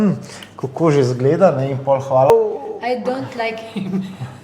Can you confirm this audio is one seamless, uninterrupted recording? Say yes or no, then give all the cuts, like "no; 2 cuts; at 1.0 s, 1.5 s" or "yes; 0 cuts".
no; 1 cut; at 2.3 s